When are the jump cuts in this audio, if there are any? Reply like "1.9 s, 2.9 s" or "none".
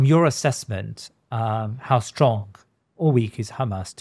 none